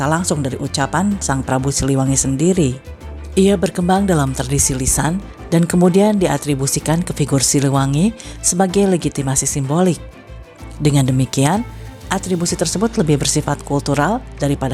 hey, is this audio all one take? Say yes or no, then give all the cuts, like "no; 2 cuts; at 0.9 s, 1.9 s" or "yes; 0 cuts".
yes; 0 cuts